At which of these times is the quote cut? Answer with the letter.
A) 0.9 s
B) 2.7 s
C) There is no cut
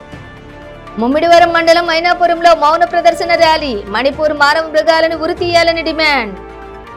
A